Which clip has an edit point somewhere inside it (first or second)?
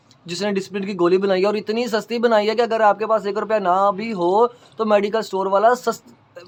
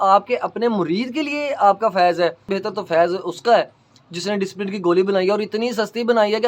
second